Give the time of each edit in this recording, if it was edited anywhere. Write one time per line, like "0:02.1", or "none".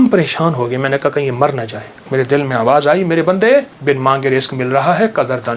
0:02.1
0:03.7